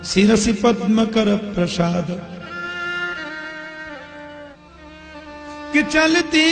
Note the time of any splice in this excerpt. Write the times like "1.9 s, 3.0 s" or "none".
none